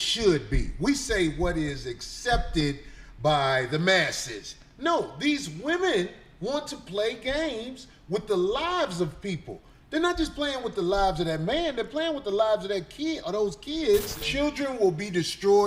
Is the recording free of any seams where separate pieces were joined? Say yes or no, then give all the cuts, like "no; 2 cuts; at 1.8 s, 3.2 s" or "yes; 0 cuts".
no; 1 cut; at 14.3 s